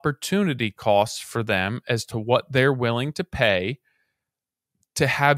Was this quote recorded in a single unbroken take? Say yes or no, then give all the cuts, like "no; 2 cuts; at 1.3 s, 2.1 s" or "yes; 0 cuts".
yes; 0 cuts